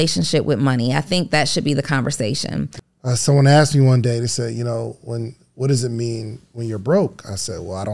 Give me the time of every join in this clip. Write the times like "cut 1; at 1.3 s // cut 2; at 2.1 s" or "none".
cut 1; at 2.8 s